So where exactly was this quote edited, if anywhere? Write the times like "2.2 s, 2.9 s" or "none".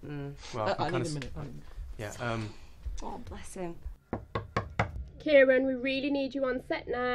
1.6 s